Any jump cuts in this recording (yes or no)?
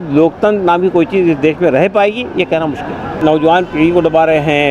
yes